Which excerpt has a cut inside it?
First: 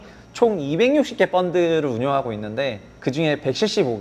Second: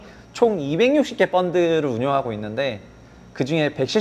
first; 1 cut; at 2.9 s

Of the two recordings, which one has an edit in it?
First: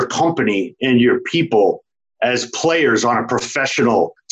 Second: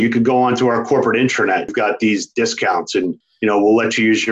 second; 2 cuts; at 1.7 s, 3.3 s

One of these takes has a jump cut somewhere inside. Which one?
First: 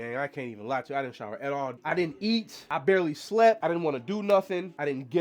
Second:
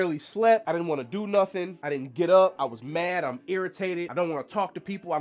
first; 1 cut; at 1.8 s

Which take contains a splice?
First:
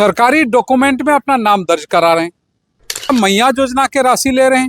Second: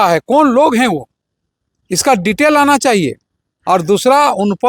first; 1 cut; at 3.1 s

